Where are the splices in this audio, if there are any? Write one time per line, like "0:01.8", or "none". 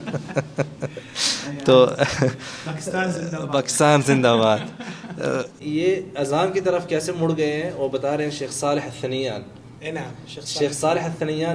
0:05.6